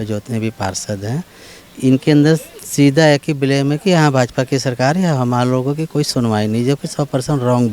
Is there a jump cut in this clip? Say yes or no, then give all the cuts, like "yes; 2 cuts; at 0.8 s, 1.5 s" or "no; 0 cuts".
no; 0 cuts